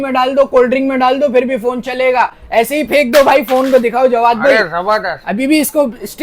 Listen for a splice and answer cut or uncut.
uncut